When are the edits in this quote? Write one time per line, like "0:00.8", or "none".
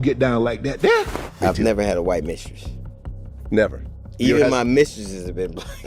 0:01.2